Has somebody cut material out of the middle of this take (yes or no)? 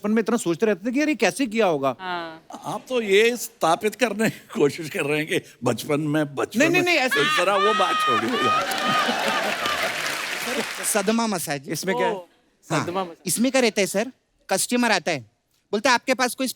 yes